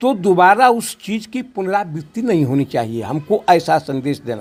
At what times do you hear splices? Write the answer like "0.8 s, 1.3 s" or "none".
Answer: none

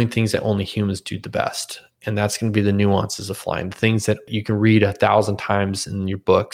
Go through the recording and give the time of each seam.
4.3 s

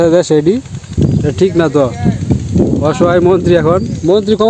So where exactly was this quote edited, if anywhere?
none

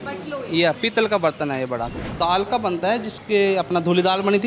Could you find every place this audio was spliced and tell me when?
1.9 s

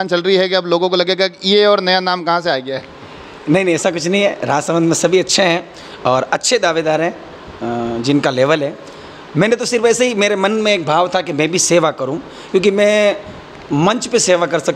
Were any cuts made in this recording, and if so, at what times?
none

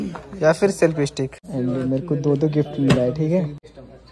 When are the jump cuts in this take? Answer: 1.3 s

